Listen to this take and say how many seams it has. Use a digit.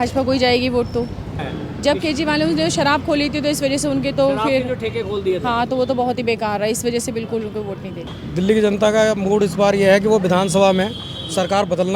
2